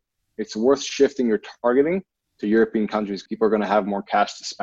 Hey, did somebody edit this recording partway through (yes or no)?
yes